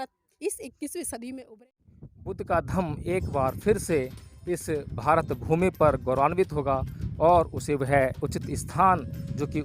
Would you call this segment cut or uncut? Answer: cut